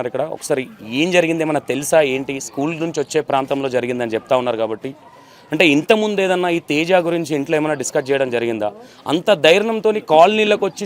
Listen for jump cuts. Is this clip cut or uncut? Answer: uncut